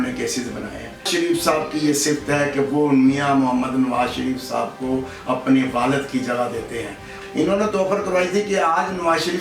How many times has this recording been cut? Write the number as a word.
two